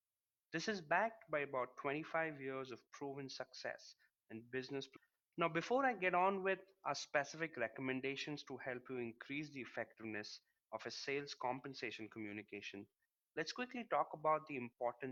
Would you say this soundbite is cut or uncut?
uncut